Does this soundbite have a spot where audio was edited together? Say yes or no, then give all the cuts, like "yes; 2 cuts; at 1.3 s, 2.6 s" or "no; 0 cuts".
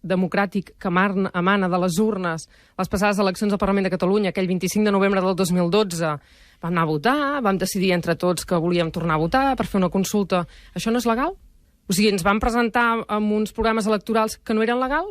yes; 1 cut; at 10.2 s